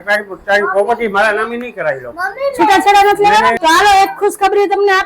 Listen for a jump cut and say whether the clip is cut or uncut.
cut